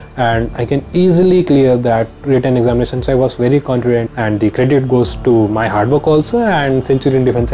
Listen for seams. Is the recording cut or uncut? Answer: cut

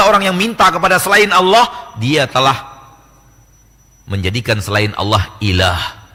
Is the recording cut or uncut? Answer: uncut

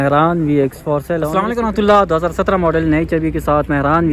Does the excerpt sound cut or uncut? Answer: cut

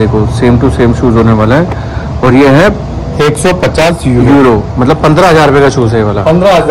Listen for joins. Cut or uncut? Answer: uncut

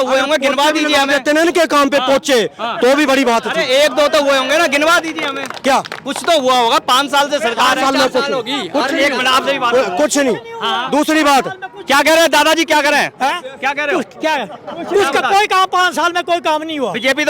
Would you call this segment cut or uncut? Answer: uncut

